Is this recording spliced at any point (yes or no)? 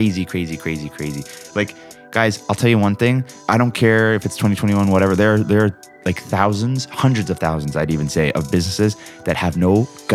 yes